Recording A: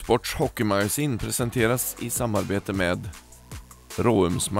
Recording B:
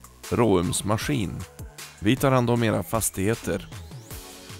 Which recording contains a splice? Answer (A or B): B